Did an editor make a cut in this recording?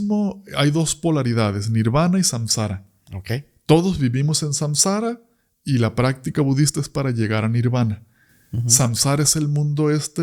no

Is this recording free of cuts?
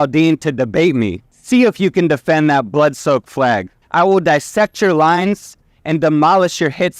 no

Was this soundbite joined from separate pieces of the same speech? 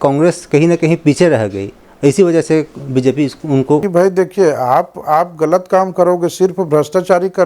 yes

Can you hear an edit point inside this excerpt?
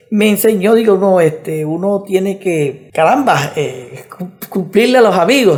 no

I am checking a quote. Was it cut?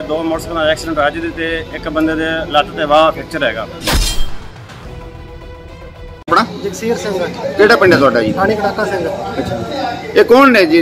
yes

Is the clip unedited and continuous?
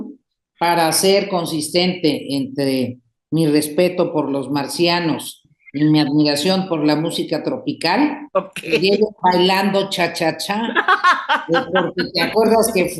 yes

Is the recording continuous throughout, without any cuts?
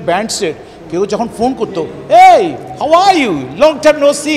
yes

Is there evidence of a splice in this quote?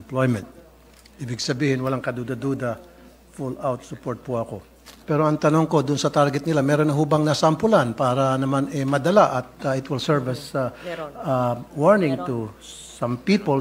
yes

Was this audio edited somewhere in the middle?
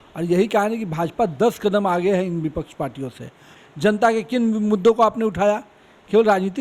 yes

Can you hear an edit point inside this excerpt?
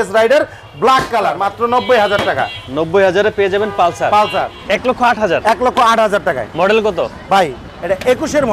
yes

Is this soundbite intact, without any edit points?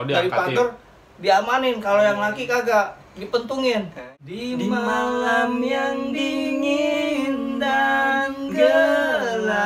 no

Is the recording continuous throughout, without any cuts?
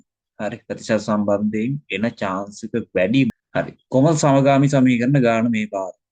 no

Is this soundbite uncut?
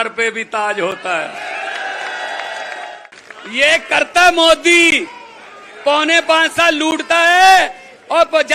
no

